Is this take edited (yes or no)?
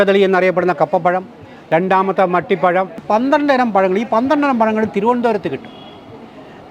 yes